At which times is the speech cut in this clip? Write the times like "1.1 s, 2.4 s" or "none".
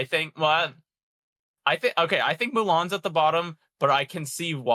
none